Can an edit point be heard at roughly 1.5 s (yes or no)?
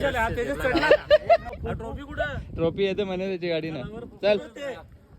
yes